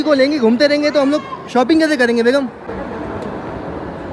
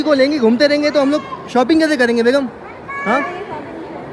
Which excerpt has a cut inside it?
first; 1 cut; at 2.7 s

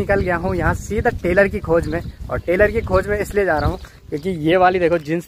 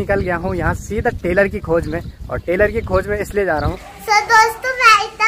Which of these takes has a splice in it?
second; 1 cut; at 3.9 s

